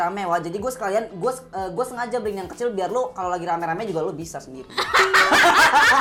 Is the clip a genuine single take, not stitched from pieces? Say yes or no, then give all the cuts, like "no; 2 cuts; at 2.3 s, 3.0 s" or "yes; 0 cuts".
yes; 0 cuts